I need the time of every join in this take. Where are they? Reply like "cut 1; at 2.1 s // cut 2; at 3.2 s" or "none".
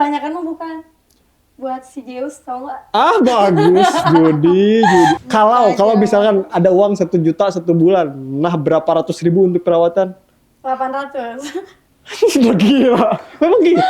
cut 1; at 5.2 s